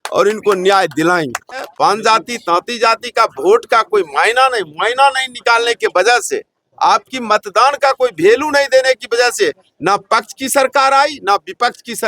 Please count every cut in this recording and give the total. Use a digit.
1